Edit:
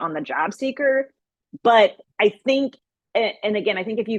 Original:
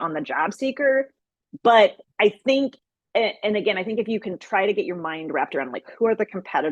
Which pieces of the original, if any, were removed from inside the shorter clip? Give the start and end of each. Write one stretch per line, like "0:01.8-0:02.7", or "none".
none